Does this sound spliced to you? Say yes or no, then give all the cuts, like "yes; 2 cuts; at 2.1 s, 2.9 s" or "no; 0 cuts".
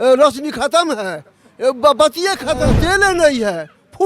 yes; 1 cut; at 2.7 s